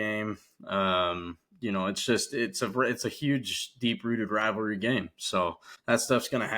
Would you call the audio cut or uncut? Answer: cut